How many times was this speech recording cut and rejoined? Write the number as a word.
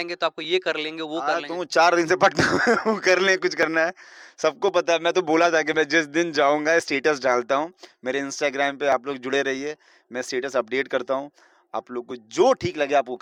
zero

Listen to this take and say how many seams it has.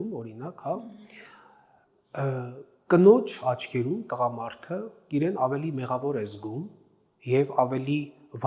zero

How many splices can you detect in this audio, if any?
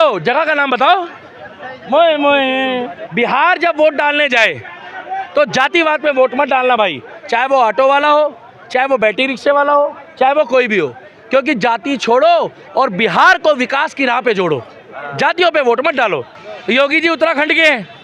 two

